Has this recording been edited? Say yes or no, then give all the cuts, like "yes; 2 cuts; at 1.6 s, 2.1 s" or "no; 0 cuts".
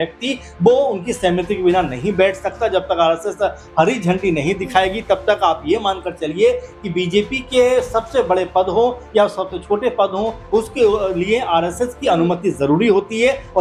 no; 0 cuts